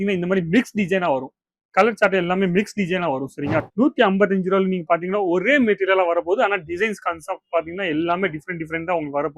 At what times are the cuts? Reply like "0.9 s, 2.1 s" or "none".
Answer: 3.6 s